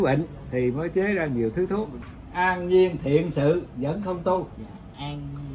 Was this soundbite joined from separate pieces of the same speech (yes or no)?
yes